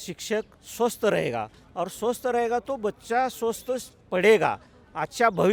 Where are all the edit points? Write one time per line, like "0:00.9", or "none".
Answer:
none